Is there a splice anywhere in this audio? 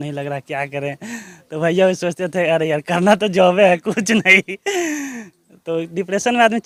no; 0 cuts

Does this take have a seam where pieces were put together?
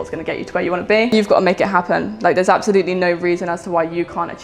yes; 1 cut; at 1.1 s

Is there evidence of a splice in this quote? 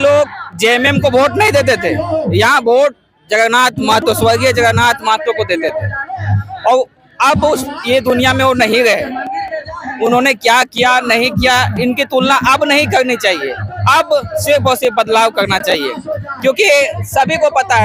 no; 0 cuts

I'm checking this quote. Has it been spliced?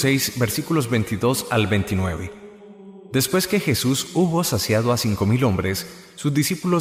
no; 0 cuts

